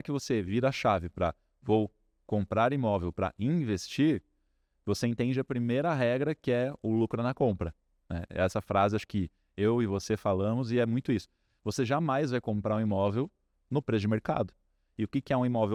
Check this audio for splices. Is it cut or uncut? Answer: uncut